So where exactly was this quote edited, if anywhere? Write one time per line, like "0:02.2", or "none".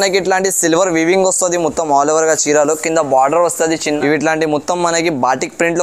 0:03.8